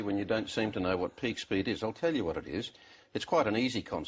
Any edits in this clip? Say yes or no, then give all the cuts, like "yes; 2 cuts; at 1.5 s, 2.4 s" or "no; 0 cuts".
no; 0 cuts